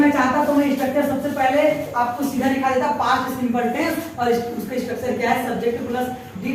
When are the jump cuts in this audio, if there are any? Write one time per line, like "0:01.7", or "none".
none